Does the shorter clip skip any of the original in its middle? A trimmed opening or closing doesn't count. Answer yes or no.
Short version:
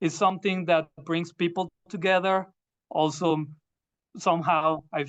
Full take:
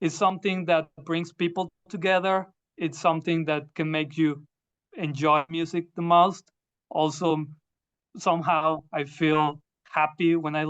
yes